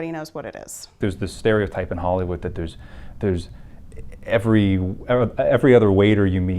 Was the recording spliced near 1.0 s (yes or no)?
yes